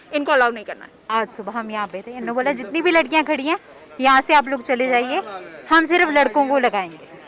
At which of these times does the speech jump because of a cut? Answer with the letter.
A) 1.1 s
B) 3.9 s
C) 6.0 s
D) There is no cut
A